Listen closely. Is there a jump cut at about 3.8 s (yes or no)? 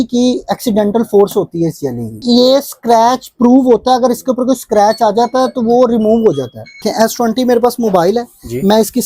no